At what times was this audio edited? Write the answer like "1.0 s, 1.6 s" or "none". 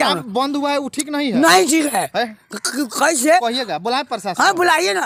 none